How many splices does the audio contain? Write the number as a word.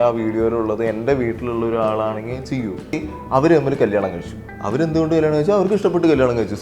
one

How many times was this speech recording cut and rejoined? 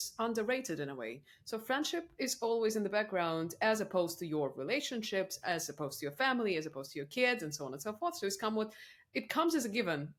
zero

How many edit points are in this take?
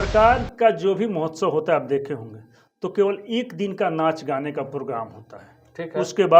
zero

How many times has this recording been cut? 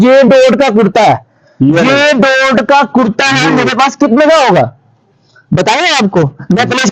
zero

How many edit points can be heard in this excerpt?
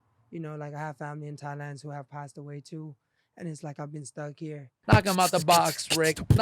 one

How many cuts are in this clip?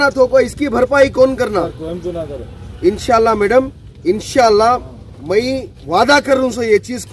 zero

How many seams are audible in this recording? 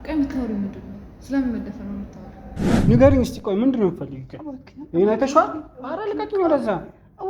one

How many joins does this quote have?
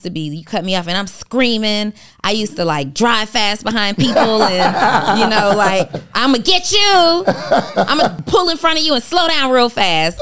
one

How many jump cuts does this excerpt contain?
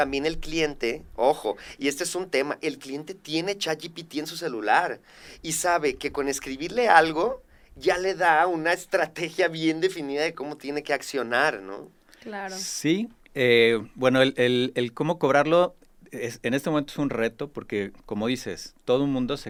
zero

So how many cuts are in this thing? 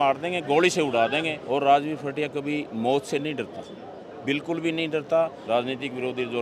two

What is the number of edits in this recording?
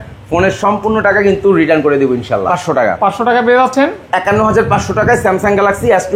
one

